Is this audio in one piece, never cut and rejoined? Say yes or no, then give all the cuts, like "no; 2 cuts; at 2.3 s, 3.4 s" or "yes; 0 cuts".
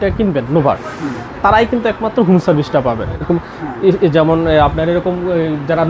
no; 1 cut; at 3.2 s